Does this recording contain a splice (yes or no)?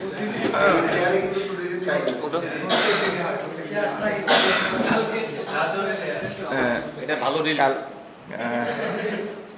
no